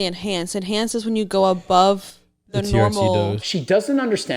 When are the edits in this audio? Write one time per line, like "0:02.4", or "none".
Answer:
0:03.4